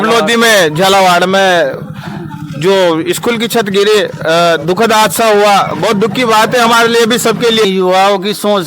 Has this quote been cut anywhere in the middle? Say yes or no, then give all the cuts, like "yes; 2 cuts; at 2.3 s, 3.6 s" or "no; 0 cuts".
yes; 1 cut; at 7.6 s